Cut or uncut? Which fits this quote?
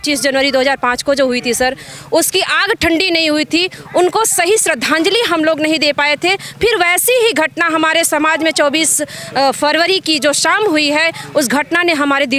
uncut